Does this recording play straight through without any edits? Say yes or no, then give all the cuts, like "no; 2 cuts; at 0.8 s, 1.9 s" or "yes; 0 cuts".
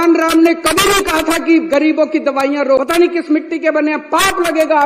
no; 1 cut; at 2.8 s